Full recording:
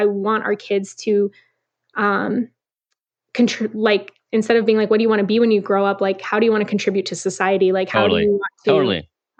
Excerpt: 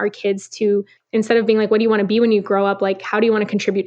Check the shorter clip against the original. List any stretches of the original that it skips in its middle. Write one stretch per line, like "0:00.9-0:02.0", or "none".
0:01.4-0:04.2